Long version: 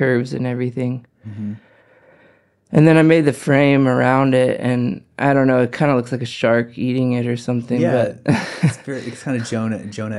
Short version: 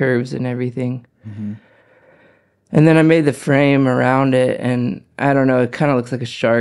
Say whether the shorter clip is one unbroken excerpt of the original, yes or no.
yes